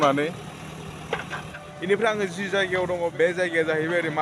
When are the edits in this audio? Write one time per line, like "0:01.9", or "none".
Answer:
0:01.5
0:03.1

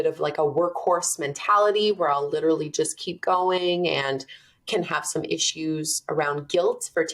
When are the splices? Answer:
none

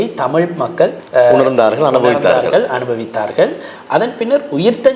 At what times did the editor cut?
0:03.7

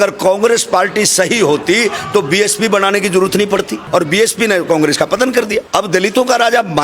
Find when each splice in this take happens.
0:03.8
0:05.7

